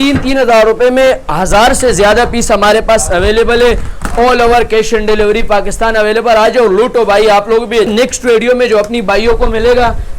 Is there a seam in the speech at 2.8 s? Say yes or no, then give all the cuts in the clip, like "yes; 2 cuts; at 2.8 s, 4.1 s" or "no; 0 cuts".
no; 1 cut; at 7.9 s